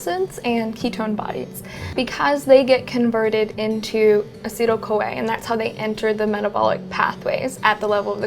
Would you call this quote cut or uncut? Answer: cut